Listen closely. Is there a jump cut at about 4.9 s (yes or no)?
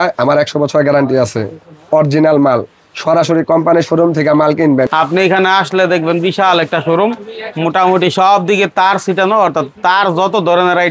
yes